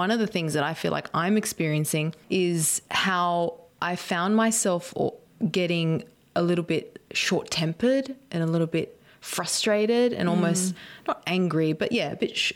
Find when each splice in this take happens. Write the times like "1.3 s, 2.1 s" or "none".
2.2 s, 5.2 s